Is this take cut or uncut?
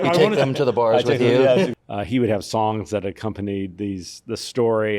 cut